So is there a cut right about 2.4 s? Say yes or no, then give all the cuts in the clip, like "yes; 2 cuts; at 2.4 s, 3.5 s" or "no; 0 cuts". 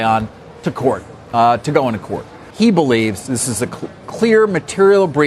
yes; 1 cut; at 2.4 s